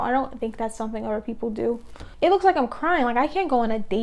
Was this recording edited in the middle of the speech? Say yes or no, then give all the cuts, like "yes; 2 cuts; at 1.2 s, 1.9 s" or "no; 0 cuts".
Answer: yes; 1 cut; at 2.0 s